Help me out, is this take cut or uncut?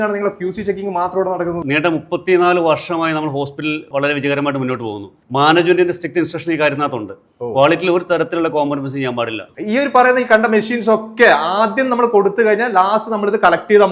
cut